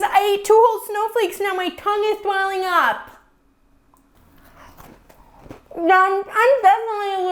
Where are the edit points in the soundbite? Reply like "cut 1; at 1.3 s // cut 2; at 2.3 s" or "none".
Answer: none